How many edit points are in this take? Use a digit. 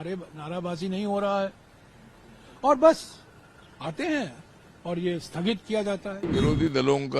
1